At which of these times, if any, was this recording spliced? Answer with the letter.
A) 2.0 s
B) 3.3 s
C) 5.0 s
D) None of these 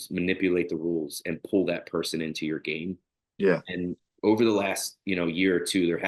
D